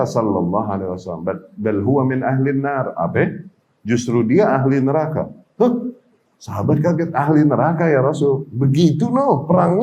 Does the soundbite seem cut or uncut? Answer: uncut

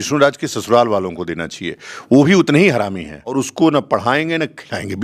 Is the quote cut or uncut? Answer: cut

